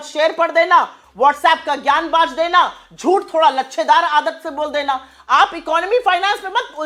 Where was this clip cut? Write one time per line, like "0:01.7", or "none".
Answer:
none